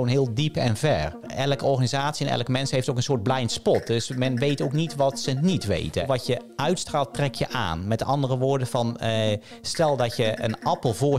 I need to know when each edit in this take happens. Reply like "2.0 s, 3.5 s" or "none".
1.3 s, 6.1 s

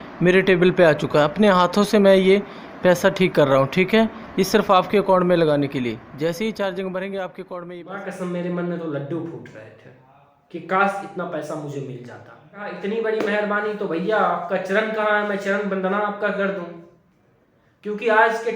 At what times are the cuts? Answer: 8.0 s, 12.7 s

